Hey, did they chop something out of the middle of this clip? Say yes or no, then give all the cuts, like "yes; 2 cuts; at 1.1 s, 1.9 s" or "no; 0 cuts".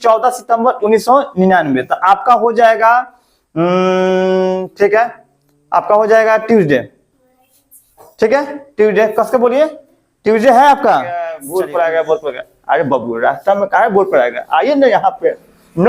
yes; 1 cut; at 11.4 s